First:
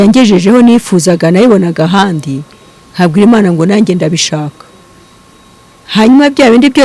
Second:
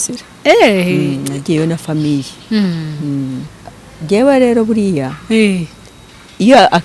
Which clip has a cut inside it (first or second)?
second